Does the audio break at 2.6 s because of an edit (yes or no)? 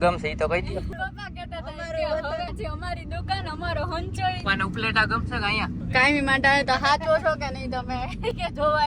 yes